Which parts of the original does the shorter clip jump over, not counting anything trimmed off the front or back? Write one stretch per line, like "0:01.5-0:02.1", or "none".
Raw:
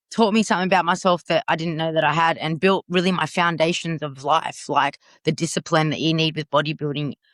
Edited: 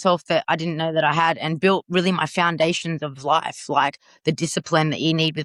none